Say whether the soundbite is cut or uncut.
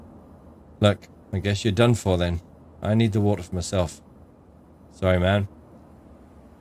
cut